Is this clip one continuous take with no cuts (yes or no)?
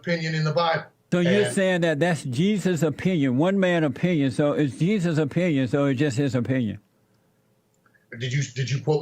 no